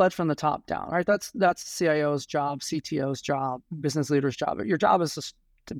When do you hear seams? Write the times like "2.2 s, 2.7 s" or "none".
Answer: 3.7 s

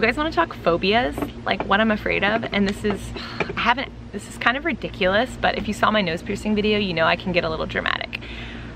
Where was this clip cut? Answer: none

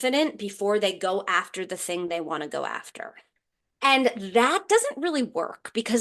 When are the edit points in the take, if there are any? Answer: 3.2 s

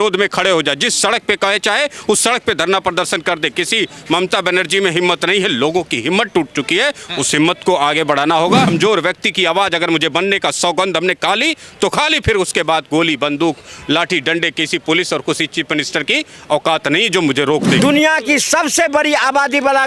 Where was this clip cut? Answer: 8.7 s, 17.8 s

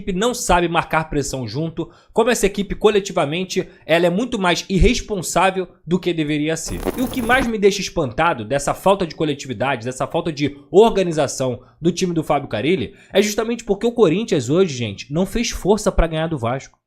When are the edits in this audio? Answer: 6.8 s

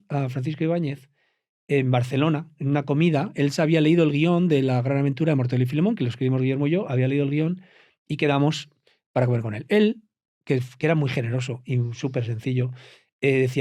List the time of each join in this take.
none

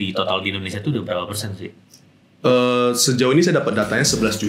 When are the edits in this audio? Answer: none

